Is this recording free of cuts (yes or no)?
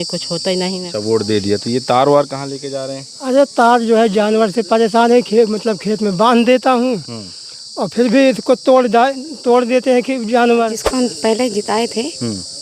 no